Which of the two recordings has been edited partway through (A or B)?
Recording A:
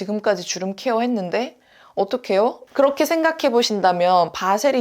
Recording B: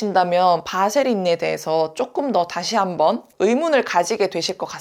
A